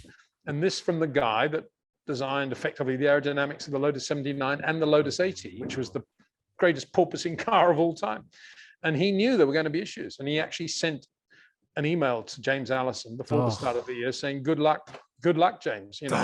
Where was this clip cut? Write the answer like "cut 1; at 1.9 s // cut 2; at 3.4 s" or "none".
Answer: none